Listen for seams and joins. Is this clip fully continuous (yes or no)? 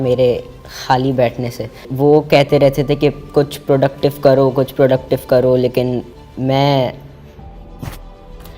no